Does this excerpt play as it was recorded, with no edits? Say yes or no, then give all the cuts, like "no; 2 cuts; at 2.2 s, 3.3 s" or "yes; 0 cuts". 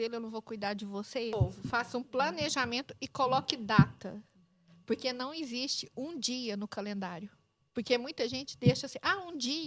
no; 1 cut; at 1.6 s